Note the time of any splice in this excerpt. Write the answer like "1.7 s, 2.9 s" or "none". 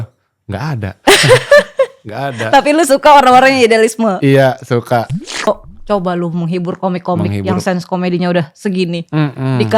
5.5 s